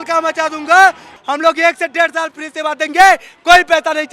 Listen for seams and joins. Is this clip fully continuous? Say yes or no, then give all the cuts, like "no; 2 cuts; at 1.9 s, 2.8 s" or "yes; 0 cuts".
no; 1 cut; at 1.1 s